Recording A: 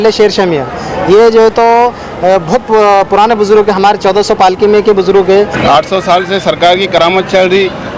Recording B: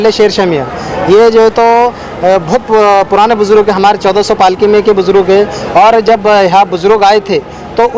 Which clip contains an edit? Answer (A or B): A